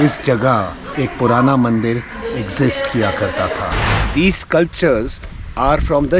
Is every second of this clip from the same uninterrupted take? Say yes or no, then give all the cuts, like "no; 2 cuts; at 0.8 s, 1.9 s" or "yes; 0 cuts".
no; 1 cut; at 4.0 s